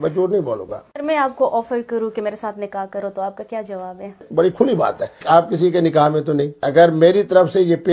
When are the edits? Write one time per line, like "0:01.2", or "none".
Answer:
0:01.0
0:04.3
0:05.2
0:06.6